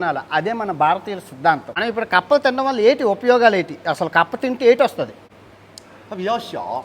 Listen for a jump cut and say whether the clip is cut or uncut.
cut